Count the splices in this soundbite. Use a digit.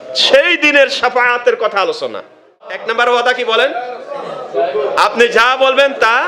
1